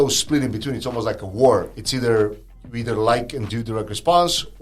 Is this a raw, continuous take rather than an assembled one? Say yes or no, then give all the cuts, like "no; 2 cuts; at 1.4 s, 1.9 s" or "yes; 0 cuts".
yes; 0 cuts